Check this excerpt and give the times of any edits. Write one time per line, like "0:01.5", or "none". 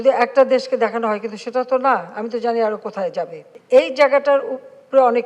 0:03.4

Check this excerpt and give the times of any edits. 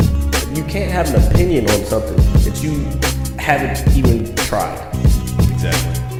none

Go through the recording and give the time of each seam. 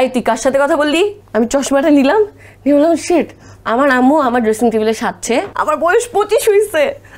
0:01.2
0:05.5

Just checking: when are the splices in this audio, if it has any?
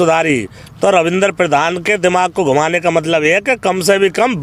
none

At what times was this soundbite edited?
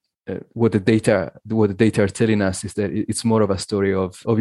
none

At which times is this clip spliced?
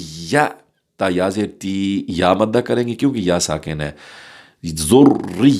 none

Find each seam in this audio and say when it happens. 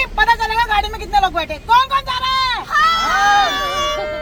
none

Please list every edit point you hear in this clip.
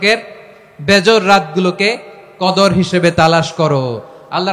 none

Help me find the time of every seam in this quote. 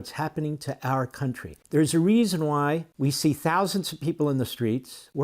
0:01.5
0:02.9

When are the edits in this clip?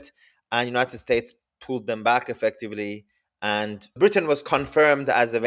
0:04.0

